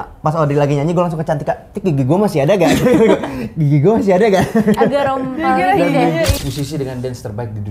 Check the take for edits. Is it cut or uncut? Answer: cut